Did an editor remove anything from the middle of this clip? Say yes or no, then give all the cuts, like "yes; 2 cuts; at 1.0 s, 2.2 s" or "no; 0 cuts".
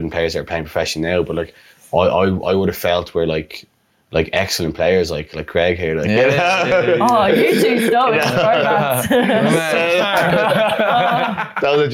no; 0 cuts